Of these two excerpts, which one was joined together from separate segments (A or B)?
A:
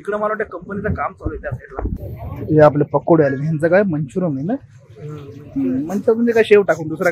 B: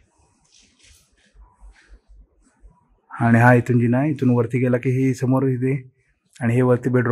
A